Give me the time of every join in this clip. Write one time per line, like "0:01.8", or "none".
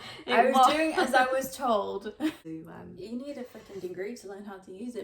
0:02.4